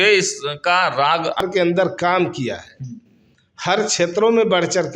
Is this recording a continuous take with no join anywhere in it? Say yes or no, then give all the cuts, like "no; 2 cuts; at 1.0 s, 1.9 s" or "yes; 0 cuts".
no; 1 cut; at 1.4 s